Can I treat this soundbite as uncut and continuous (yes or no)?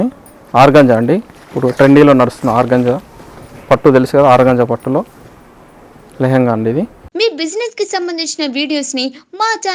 no